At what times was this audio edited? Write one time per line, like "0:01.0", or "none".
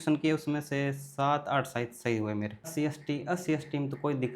0:02.7